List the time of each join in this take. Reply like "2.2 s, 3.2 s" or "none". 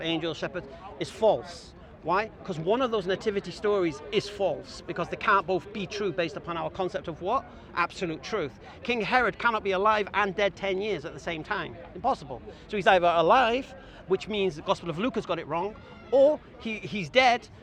none